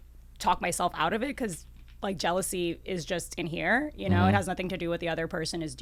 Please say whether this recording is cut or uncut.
uncut